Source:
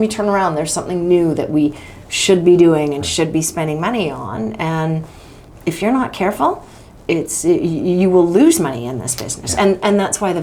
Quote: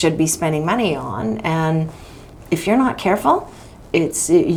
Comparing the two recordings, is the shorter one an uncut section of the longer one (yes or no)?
yes